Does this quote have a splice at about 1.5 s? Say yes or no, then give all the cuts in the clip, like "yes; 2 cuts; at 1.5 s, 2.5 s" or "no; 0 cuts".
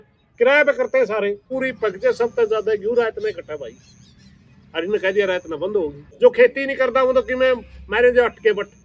yes; 2 cuts; at 1.5 s, 6.0 s